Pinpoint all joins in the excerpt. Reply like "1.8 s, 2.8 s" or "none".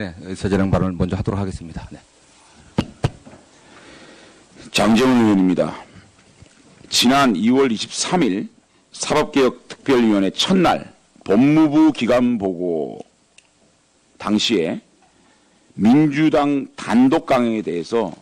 1.1 s